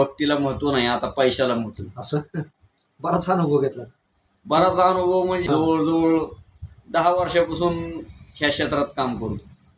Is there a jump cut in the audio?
no; 0 cuts

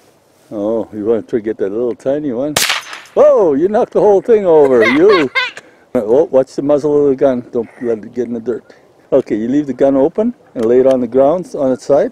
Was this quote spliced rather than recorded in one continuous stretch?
yes; 2 cuts; at 5.9 s, 8.9 s

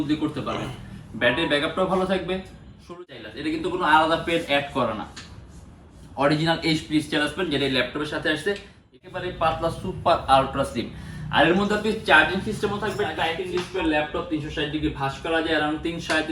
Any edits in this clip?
yes; 3 cuts; at 2.9 s, 9.0 s, 13.4 s

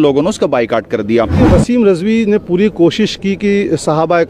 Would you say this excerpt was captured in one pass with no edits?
no; 1 cut; at 1.4 s

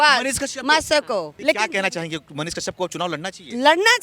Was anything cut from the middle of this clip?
yes; 1 cut; at 1.3 s

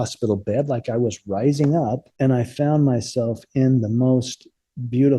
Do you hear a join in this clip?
yes; 1 cut; at 2.1 s

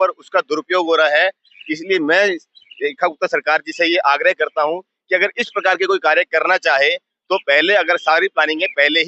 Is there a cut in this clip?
no; 0 cuts

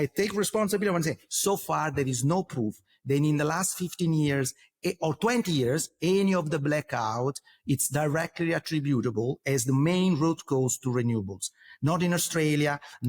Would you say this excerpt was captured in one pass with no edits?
yes; 0 cuts

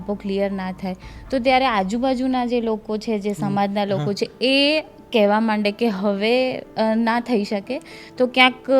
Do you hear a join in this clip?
no; 0 cuts

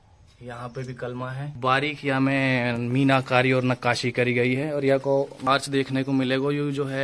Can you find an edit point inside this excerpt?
yes; 2 cuts; at 1.6 s, 5.5 s

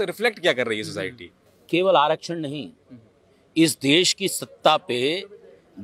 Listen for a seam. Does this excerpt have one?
no; 0 cuts

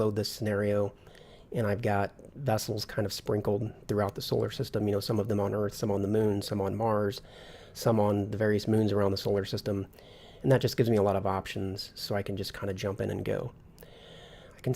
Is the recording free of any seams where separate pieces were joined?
no; 1 cut; at 9.2 s

